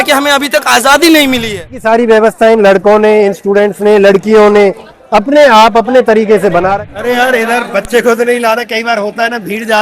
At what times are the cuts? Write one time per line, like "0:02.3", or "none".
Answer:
0:01.8
0:06.7